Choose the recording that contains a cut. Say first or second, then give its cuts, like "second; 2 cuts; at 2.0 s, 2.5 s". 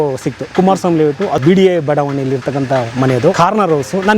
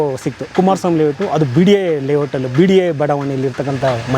first; 2 cuts; at 1.4 s, 3.3 s